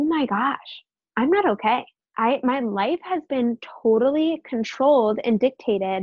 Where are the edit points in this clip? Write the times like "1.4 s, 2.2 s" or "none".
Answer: 2.0 s